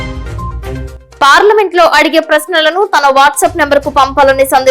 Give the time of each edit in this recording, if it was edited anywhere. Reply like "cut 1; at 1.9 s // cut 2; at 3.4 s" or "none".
cut 1; at 1.0 s

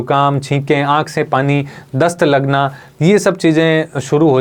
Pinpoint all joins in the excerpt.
none

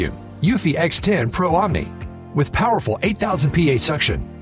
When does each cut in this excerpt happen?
none

